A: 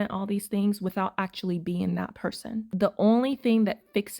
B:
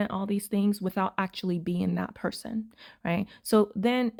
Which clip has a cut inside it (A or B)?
A